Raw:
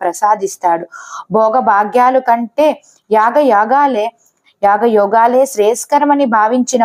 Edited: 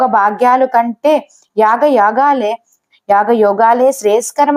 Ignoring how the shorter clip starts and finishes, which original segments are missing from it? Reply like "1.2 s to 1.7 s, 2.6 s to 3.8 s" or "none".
none